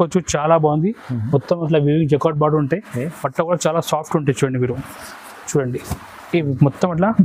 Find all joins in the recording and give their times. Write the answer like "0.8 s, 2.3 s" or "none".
none